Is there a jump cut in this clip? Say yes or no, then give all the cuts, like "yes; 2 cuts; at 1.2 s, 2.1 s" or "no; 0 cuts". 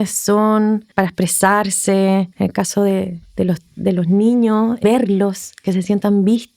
yes; 3 cuts; at 0.9 s, 2.3 s, 4.8 s